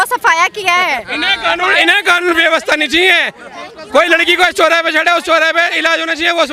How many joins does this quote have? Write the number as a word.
zero